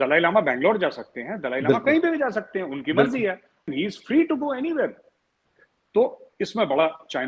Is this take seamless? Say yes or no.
no